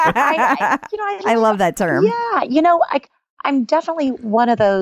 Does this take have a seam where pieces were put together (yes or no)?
no